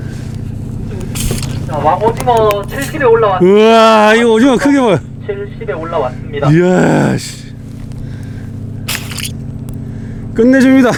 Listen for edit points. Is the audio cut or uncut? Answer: uncut